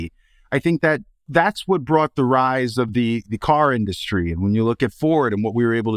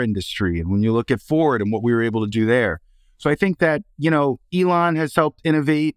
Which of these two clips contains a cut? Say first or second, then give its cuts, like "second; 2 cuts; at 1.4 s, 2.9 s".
first; 1 cut; at 1.2 s